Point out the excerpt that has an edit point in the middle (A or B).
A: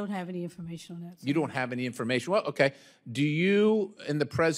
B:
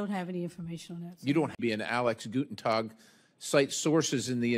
B